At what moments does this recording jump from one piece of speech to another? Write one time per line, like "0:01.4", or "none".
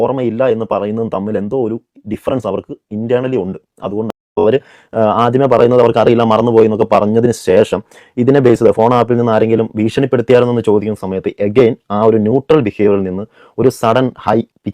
0:04.4